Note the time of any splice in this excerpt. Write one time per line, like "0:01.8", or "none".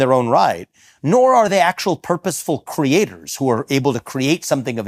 none